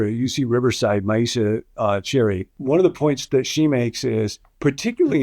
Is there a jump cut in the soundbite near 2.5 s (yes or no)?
yes